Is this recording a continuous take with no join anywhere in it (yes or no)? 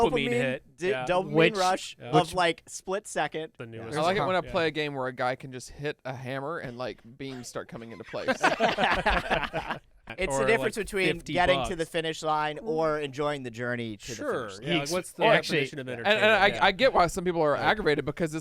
no